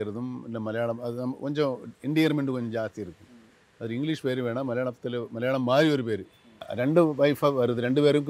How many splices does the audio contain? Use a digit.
1